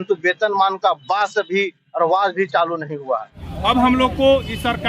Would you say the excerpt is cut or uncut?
cut